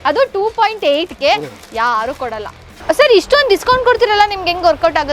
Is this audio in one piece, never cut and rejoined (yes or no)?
no